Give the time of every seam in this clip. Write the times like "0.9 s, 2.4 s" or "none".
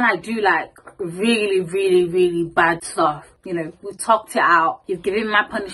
3.3 s, 4.8 s